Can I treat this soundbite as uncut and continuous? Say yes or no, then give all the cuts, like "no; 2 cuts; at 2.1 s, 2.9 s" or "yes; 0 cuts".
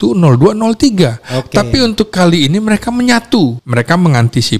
no; 1 cut; at 3.6 s